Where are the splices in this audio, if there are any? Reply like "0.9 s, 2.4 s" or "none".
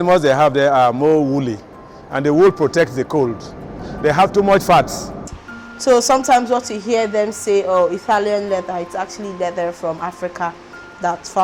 3.8 s, 5.3 s